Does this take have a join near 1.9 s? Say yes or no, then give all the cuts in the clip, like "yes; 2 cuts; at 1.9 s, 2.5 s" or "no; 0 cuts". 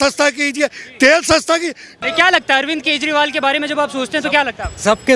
yes; 1 cut; at 1.9 s